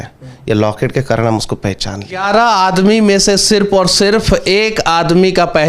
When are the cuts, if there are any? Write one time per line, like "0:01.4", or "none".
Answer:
0:02.2